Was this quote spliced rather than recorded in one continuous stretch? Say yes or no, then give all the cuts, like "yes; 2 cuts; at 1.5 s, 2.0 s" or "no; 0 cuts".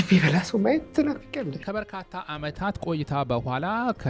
yes; 1 cut; at 1.6 s